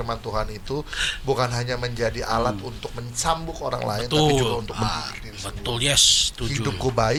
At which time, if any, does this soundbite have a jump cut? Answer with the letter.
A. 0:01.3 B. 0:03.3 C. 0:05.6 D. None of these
D